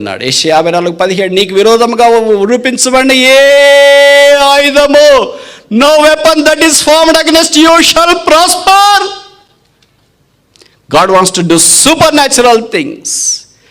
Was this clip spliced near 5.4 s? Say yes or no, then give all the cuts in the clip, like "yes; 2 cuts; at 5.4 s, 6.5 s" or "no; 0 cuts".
no; 0 cuts